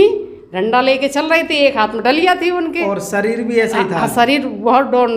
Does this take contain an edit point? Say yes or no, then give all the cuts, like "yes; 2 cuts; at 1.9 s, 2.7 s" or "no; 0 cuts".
no; 0 cuts